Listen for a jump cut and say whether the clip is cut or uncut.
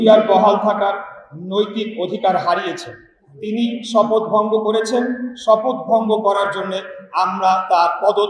uncut